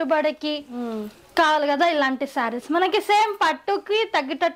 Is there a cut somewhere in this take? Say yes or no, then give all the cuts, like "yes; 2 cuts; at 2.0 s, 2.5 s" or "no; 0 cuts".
no; 0 cuts